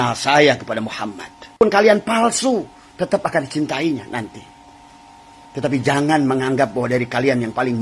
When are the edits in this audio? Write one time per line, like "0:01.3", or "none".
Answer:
0:01.6